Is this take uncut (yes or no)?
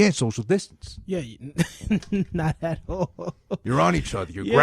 no